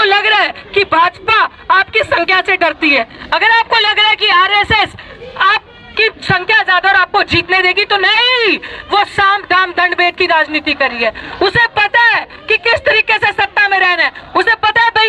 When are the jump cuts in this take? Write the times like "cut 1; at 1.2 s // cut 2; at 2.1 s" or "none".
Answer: none